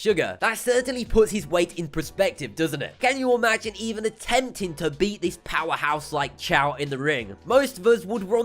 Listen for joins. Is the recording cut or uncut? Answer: cut